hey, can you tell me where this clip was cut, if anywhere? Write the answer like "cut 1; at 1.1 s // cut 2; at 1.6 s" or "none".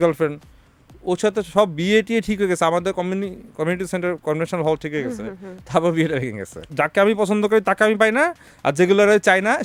cut 1; at 6.7 s

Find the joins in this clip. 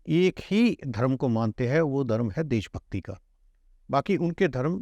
none

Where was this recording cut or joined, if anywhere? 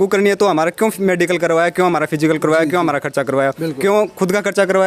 none

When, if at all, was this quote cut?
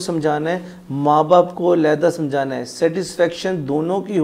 none

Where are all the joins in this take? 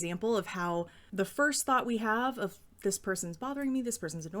cut 1; at 1.0 s

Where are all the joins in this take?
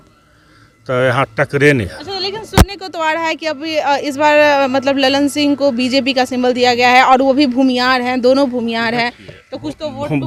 none

